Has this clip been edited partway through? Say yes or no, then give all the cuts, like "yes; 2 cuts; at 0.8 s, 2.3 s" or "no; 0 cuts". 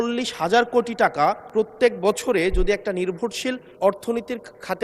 yes; 2 cuts; at 1.4 s, 3.7 s